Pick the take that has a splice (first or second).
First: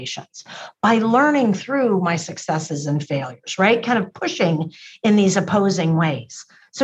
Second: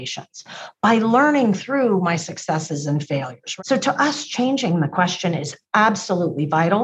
second